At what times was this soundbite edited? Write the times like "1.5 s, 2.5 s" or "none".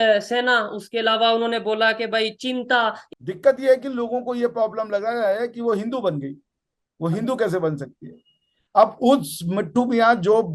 3.0 s